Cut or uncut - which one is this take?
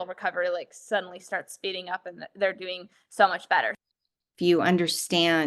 cut